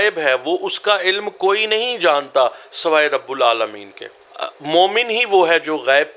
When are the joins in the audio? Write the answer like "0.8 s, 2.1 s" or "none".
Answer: 4.2 s